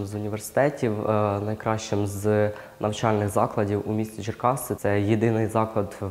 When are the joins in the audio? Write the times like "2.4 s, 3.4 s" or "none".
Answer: none